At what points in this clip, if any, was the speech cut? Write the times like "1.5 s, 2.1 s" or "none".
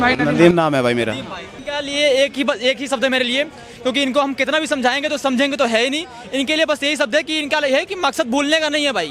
none